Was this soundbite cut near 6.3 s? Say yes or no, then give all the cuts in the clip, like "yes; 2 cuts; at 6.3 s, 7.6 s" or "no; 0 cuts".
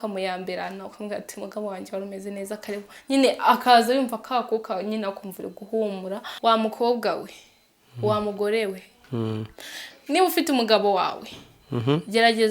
yes; 1 cut; at 6.3 s